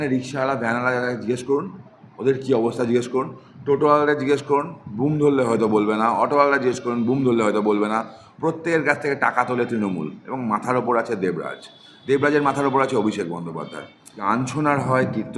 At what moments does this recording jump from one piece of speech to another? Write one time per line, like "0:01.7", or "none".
0:14.2